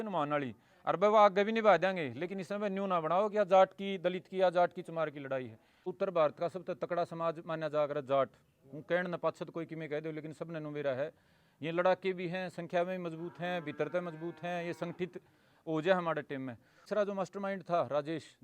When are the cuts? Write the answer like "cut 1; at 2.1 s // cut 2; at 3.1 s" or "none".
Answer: cut 1; at 5.9 s // cut 2; at 16.8 s